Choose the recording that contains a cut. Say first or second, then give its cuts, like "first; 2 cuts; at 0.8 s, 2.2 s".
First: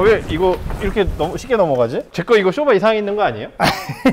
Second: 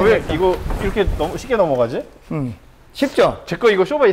first; 1 cut; at 2.1 s